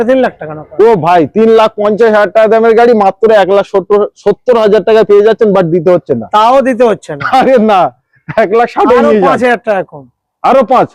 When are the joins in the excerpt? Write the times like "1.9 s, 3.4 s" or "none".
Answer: none